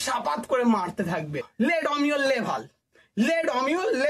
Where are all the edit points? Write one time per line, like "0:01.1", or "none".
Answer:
0:01.5